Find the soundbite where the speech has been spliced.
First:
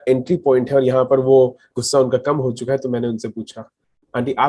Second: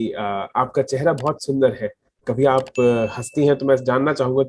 first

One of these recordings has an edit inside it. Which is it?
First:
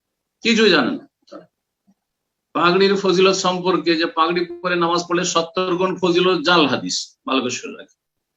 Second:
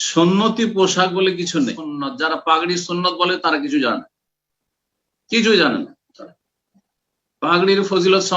second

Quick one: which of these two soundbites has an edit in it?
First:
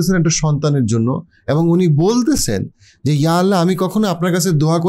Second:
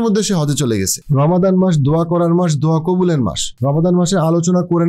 second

